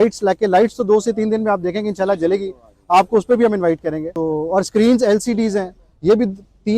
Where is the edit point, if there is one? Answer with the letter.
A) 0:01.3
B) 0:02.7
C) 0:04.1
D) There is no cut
C